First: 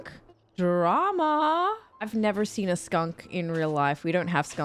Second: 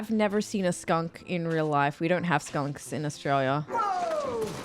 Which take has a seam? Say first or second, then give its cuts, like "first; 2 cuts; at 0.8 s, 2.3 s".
second; 1 cut; at 3.7 s